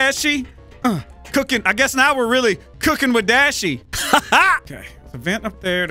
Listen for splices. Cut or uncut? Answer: cut